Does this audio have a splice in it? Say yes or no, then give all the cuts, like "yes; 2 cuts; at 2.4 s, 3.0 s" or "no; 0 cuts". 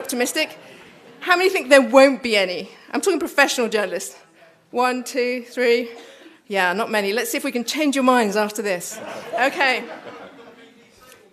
no; 0 cuts